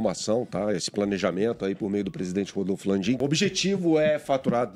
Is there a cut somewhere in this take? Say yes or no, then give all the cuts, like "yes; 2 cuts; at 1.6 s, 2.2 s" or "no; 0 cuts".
yes; 1 cut; at 3.2 s